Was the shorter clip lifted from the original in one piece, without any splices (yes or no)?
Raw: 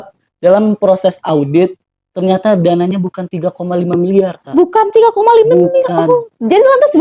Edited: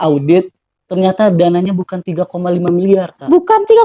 yes